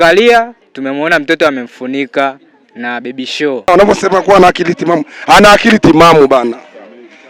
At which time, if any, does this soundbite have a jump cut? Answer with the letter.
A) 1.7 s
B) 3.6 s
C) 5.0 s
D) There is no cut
B